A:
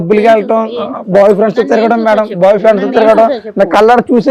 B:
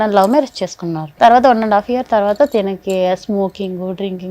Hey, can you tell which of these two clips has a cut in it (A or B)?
B